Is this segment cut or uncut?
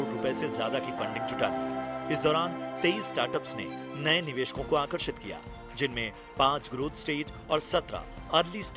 cut